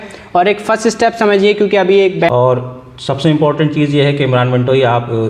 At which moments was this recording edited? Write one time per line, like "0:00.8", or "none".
0:02.3